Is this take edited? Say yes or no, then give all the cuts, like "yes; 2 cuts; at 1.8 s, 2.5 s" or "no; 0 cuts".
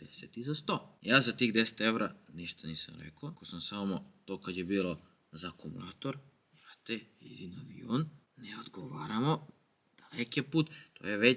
no; 0 cuts